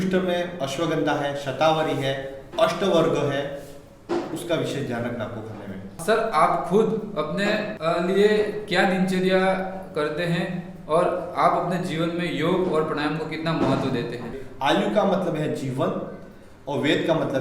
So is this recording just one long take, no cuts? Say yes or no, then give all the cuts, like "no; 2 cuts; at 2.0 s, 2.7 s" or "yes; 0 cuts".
no; 3 cuts; at 6.0 s, 7.7 s, 14.4 s